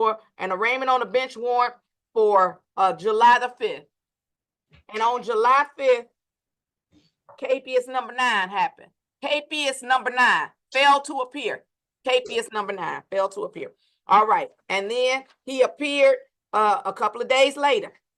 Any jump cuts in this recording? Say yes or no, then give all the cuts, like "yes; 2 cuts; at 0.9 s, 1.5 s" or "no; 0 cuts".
no; 0 cuts